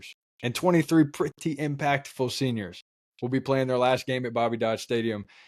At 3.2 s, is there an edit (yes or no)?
no